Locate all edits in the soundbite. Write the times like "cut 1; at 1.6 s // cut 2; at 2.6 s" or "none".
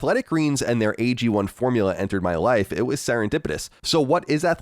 cut 1; at 3.7 s